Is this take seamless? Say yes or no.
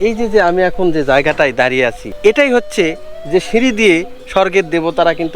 no